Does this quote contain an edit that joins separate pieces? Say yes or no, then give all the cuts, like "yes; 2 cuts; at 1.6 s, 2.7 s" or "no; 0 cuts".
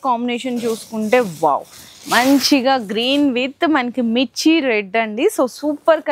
no; 0 cuts